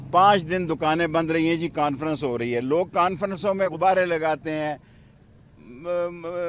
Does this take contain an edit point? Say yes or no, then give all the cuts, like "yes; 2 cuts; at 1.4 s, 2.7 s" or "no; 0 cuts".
yes; 1 cut; at 3.7 s